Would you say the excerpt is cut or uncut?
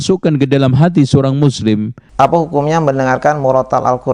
cut